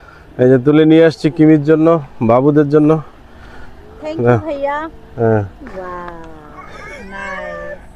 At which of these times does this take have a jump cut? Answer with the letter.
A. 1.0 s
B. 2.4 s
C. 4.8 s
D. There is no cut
D